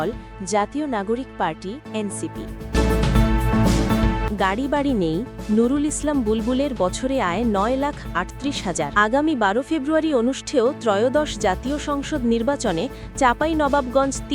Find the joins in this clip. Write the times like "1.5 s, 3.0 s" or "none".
2.7 s, 4.2 s, 8.9 s